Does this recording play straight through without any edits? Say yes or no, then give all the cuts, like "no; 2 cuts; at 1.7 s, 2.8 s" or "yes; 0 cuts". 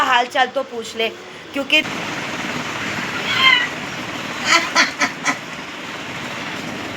no; 1 cut; at 1.8 s